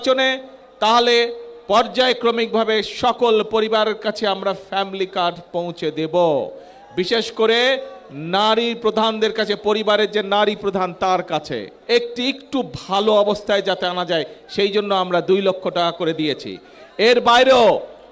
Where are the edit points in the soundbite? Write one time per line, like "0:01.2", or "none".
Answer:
0:11.7